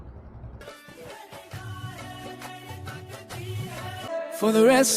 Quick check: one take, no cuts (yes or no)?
no